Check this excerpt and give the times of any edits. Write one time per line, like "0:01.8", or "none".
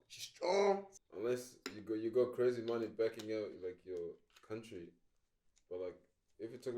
0:00.9